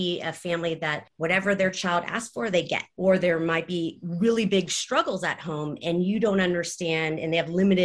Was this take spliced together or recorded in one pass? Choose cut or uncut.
cut